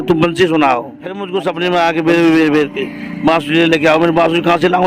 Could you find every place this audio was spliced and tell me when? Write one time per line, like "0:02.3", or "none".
0:01.3